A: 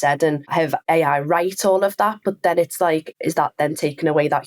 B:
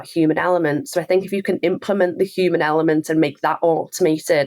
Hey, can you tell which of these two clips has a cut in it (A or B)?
A